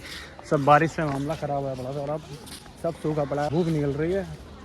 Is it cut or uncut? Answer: cut